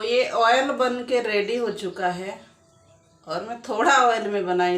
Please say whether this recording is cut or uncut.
uncut